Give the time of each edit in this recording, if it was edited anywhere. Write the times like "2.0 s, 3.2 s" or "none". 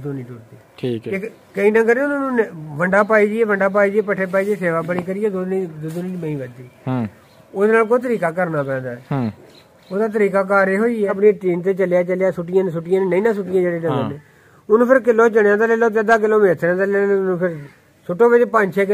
1.1 s, 11.1 s